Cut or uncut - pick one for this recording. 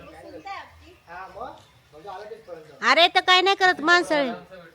uncut